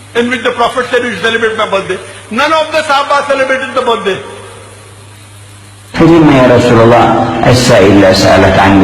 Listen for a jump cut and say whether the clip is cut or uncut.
cut